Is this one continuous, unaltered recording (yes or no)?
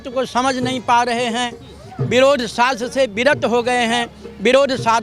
yes